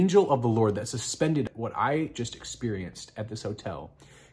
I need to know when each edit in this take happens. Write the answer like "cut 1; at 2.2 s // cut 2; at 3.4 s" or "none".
cut 1; at 1.5 s